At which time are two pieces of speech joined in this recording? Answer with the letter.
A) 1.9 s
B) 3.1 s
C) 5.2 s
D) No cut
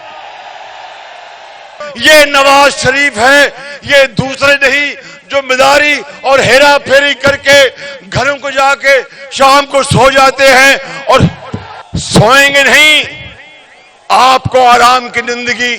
A